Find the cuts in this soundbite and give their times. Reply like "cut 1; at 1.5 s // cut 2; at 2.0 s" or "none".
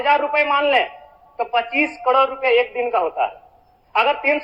none